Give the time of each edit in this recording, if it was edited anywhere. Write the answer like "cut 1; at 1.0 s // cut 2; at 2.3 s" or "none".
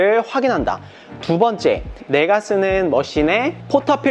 none